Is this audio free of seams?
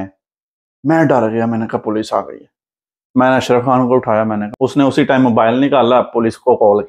no; 1 cut; at 4.4 s

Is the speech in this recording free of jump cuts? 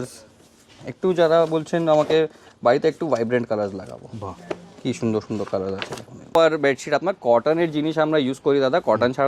no; 1 cut; at 6.2 s

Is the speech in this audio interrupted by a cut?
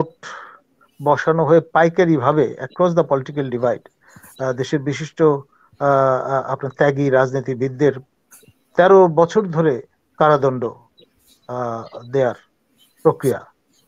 no; 0 cuts

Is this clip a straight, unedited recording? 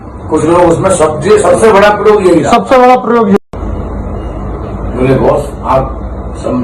no; 1 cut; at 3.4 s

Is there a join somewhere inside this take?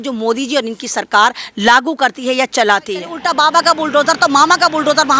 yes; 1 cut; at 3.2 s

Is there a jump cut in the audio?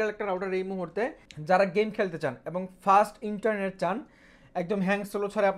no; 0 cuts

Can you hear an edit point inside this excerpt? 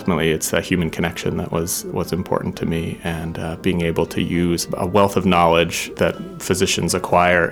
yes; 2 cuts; at 4.7 s, 5.9 s

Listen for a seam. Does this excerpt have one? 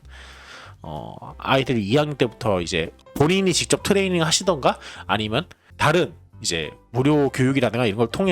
yes; 1 cut; at 3.0 s

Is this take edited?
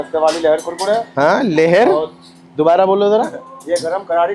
no; 0 cuts

